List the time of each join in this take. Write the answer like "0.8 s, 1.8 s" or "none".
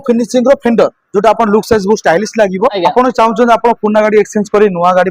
2.8 s